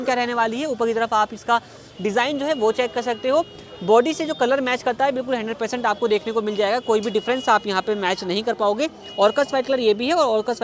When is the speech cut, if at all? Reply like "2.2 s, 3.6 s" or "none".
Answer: none